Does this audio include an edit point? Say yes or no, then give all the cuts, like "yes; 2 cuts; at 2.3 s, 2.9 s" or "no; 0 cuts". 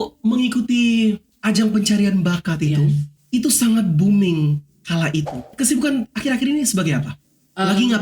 yes; 3 cuts; at 1.3 s, 3.1 s, 5.5 s